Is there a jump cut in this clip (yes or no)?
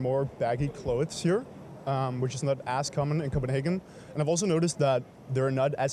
no